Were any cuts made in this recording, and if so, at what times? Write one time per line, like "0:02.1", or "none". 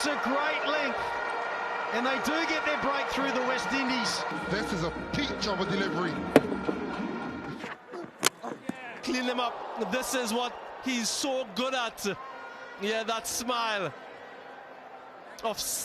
0:04.3
0:07.5